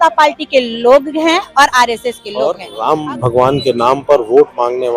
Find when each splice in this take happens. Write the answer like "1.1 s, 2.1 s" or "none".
2.7 s